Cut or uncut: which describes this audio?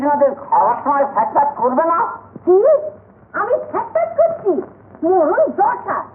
uncut